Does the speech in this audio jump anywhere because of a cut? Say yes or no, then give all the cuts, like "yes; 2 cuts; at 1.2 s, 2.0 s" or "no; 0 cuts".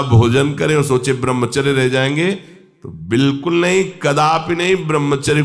no; 0 cuts